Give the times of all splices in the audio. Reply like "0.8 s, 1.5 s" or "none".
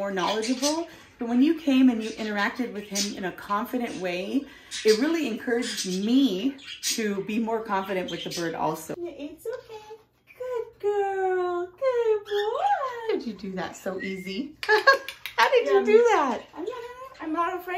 9.0 s